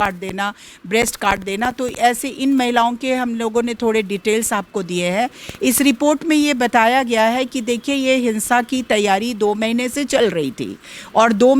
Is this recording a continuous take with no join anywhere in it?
yes; 0 cuts

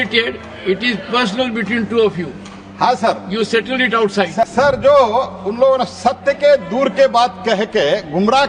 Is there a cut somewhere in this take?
yes; 1 cut; at 4.5 s

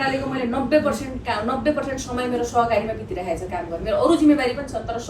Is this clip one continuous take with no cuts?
yes; 0 cuts

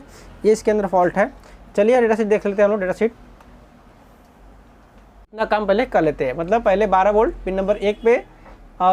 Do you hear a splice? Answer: yes; 1 cut; at 5.4 s

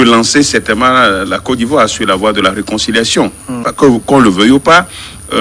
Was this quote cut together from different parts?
yes; 1 cut; at 3.7 s

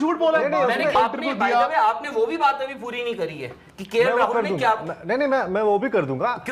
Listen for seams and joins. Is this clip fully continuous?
no; 1 cut; at 1.0 s

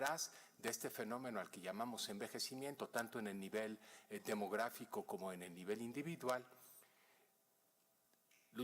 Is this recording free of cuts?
no; 1 cut; at 7.2 s

